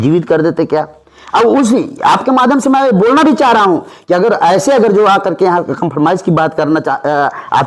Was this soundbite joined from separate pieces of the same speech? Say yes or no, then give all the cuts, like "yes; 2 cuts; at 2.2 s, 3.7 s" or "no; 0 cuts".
no; 0 cuts